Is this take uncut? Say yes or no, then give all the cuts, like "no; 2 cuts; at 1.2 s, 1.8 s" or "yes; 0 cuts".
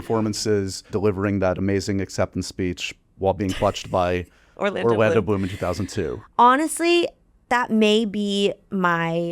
no; 1 cut; at 0.9 s